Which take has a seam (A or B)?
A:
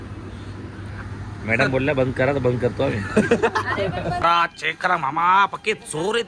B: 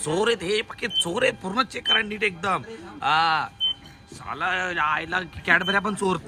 A